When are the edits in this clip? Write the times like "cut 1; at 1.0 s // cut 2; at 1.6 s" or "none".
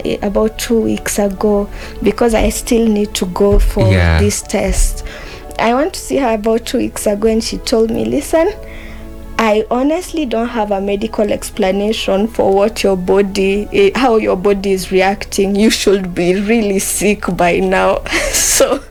none